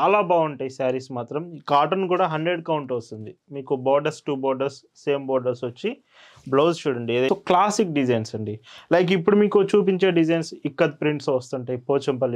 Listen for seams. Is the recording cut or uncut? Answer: cut